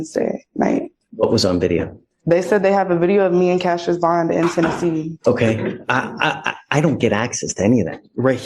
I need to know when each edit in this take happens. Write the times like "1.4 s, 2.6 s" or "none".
1.0 s, 5.1 s